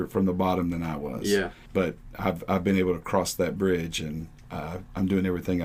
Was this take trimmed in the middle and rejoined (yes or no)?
no